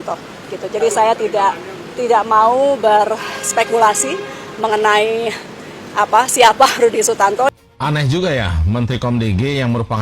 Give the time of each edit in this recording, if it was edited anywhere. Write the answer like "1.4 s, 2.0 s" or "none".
7.5 s